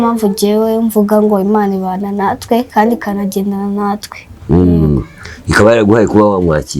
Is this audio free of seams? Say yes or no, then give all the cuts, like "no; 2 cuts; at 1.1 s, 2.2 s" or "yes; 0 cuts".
yes; 0 cuts